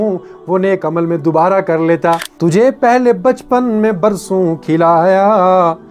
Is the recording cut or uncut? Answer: cut